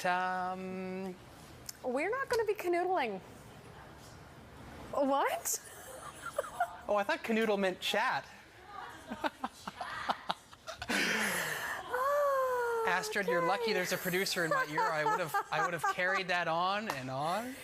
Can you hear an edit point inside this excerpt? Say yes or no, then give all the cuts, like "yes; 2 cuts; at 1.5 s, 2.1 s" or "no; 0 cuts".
no; 0 cuts